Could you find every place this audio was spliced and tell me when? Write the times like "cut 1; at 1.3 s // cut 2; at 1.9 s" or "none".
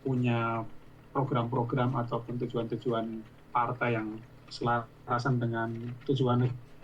none